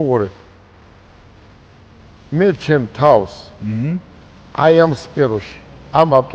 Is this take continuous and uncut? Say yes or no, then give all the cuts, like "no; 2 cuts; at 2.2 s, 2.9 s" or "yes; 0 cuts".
yes; 0 cuts